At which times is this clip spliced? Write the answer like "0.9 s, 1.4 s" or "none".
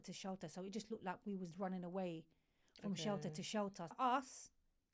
4.0 s